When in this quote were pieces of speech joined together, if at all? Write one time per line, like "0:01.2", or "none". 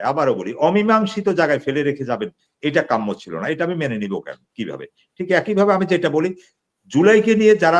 none